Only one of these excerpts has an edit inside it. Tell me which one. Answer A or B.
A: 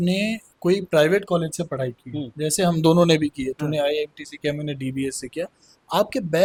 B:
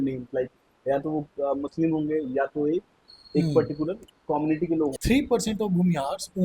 B